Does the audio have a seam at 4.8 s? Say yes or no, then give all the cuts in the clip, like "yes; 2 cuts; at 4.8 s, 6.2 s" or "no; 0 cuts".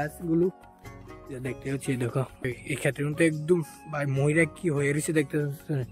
no; 1 cut; at 2.5 s